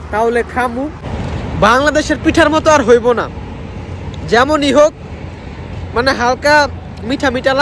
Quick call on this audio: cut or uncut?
cut